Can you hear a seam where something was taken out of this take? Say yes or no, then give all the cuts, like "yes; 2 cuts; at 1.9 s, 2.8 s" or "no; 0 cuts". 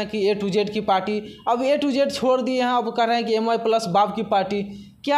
no; 0 cuts